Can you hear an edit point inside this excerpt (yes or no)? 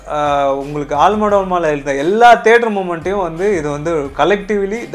no